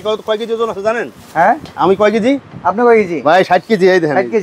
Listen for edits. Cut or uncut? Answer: uncut